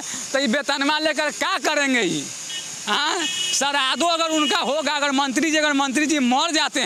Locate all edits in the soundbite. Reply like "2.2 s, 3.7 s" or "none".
none